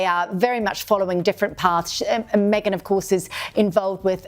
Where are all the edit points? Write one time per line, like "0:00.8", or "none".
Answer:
0:02.7